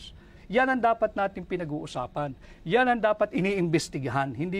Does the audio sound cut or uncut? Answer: cut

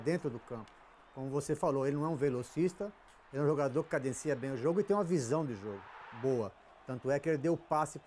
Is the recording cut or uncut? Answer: uncut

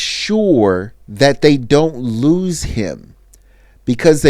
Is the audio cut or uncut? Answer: cut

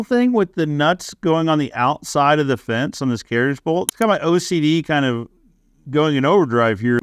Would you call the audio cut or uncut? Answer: uncut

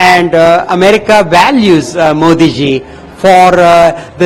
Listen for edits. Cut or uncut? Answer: uncut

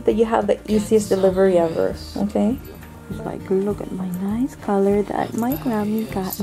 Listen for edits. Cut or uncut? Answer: cut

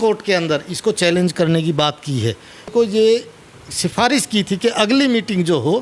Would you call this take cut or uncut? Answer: cut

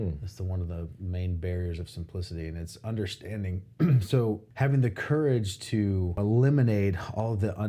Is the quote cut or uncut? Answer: cut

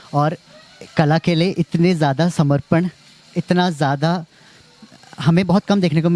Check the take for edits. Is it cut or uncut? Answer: uncut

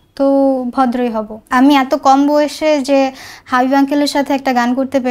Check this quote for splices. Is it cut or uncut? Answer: cut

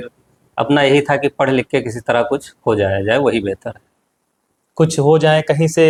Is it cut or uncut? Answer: uncut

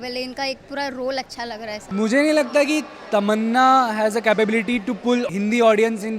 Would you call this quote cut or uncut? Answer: cut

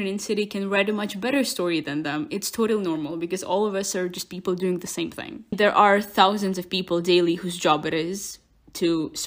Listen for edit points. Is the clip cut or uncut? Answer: cut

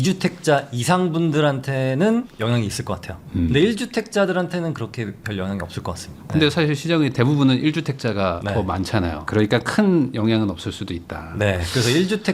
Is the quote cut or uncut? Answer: uncut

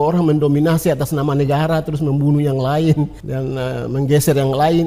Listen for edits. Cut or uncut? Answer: cut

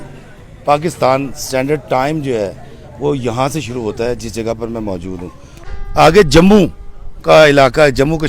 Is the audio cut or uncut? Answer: cut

